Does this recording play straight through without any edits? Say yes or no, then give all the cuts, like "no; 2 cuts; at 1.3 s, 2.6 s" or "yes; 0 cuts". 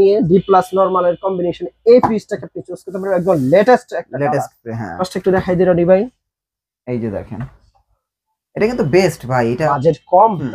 no; 2 cuts; at 5.0 s, 9.6 s